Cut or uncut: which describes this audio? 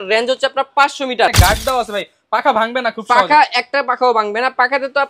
cut